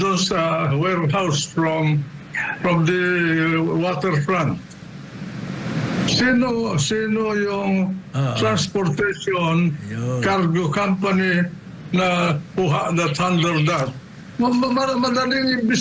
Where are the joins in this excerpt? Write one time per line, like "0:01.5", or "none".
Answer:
none